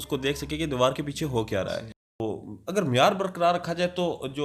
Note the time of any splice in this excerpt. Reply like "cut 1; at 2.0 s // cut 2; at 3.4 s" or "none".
cut 1; at 2.2 s